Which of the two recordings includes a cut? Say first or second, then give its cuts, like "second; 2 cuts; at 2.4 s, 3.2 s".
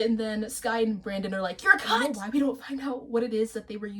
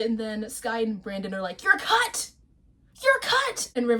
first; 1 cut; at 2.0 s